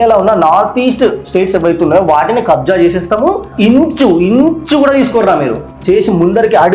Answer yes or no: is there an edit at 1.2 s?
no